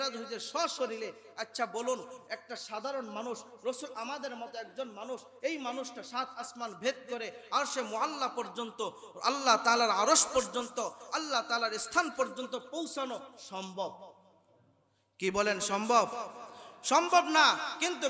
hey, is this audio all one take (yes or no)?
yes